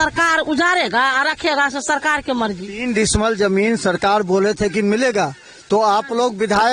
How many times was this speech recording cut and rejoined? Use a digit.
0